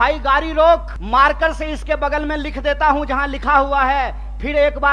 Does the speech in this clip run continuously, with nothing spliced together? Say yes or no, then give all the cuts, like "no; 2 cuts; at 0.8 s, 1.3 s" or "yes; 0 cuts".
no; 1 cut; at 0.9 s